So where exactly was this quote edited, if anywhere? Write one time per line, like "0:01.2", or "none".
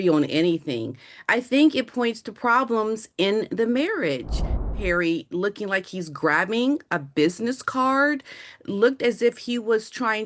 0:04.7